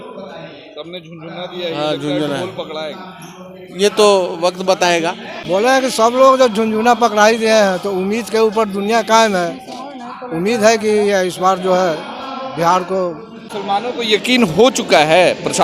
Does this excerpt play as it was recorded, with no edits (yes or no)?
no